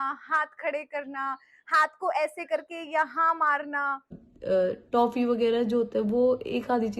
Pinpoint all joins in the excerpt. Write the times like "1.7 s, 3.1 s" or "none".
4.3 s